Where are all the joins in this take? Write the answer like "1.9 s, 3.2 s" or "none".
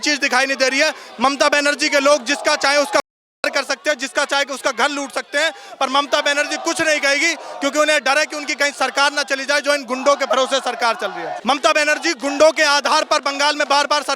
11.3 s